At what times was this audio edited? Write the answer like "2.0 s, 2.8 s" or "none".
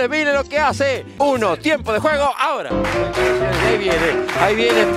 1.1 s